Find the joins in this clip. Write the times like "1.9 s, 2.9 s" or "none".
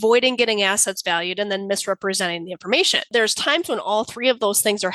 3.1 s